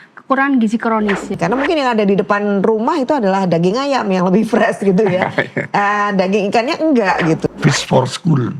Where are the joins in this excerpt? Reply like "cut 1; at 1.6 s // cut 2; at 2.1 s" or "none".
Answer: cut 1; at 1.3 s // cut 2; at 7.5 s